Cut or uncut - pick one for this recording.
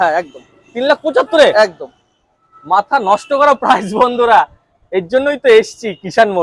uncut